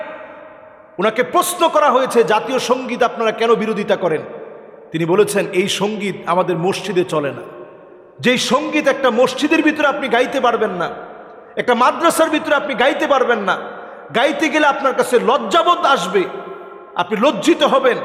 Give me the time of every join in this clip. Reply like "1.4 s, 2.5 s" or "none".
none